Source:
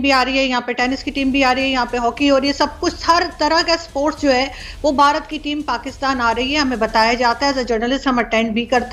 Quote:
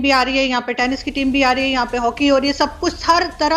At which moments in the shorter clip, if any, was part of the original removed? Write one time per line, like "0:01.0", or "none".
none